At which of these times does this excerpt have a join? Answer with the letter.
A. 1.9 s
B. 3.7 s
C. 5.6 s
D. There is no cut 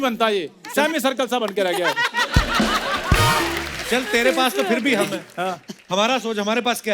B